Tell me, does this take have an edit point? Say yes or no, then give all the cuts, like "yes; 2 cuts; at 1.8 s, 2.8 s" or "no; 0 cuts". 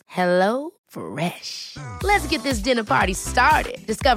no; 0 cuts